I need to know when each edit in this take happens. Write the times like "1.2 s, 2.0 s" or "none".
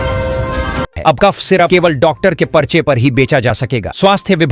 0.9 s

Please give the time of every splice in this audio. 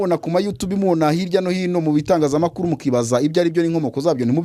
none

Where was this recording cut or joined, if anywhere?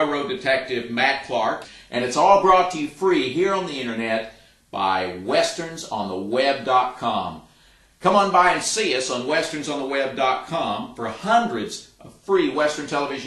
1.7 s

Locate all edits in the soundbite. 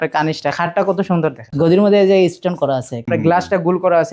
1.4 s, 2.9 s

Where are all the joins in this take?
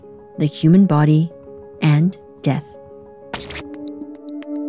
3.1 s

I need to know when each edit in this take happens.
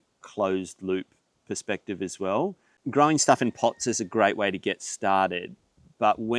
2.7 s

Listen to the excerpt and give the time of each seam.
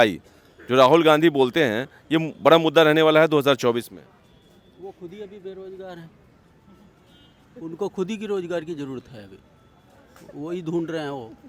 none

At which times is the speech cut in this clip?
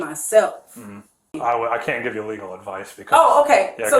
1.3 s

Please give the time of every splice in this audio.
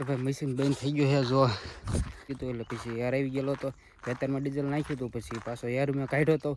2.3 s

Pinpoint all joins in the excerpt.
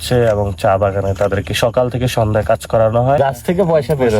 3.2 s

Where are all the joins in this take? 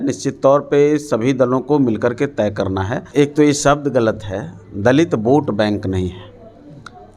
3.0 s

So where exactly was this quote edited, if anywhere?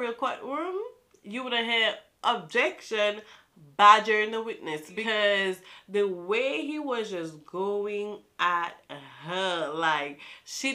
none

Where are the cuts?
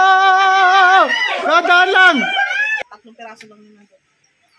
2.7 s

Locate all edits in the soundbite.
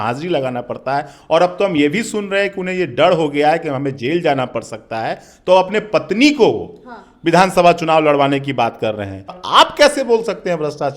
9.4 s

